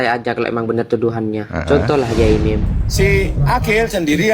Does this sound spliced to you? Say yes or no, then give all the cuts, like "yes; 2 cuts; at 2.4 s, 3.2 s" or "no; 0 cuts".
yes; 1 cut; at 2.6 s